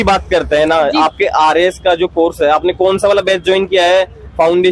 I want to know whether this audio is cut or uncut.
uncut